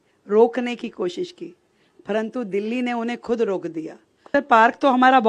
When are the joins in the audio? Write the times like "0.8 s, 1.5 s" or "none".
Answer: 4.3 s